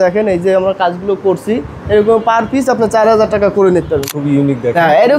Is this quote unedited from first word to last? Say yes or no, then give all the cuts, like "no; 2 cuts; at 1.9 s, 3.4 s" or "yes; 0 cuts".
no; 1 cut; at 4.1 s